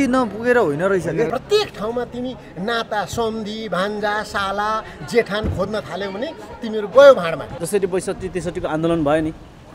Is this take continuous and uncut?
no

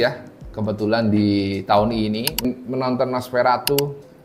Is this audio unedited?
no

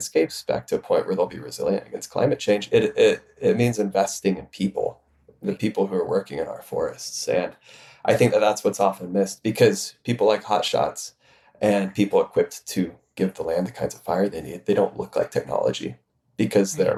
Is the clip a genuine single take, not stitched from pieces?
yes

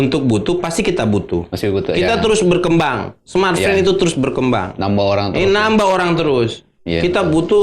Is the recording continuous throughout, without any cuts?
yes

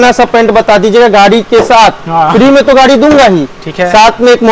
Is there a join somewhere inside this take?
no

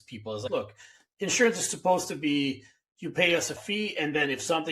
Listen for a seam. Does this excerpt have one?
yes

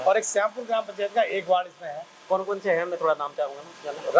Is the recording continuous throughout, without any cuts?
yes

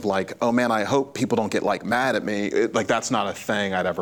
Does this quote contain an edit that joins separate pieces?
no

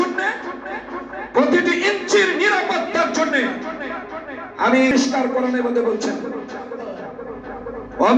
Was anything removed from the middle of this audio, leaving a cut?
yes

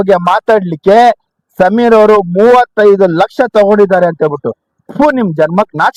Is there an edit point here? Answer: no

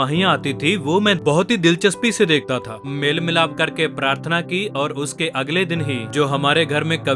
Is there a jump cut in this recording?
yes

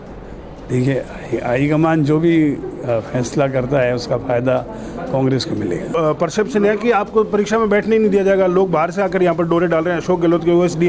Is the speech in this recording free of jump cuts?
no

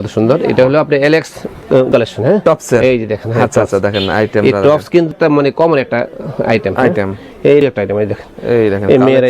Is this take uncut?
no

